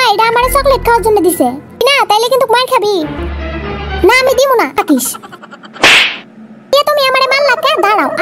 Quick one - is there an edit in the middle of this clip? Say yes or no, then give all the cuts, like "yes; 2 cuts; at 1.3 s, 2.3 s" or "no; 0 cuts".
yes; 3 cuts; at 1.8 s, 4.7 s, 6.7 s